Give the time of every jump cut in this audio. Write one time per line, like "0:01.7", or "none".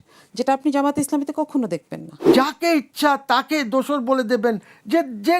0:02.2